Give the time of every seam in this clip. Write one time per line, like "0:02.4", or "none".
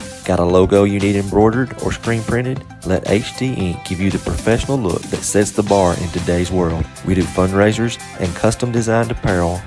none